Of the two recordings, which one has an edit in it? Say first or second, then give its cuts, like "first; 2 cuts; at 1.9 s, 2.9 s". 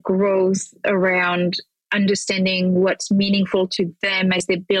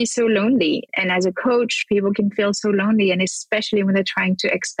second; 1 cut; at 0.9 s